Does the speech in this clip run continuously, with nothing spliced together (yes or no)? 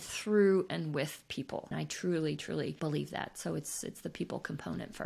yes